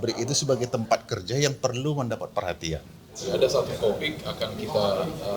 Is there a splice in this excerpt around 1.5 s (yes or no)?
no